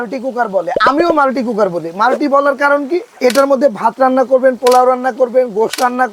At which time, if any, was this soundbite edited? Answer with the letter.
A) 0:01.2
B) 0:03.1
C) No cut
B